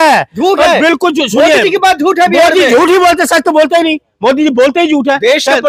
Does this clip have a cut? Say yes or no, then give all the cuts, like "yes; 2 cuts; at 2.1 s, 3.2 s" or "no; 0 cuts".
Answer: no; 0 cuts